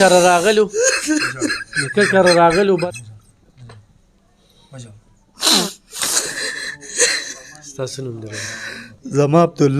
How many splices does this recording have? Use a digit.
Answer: 1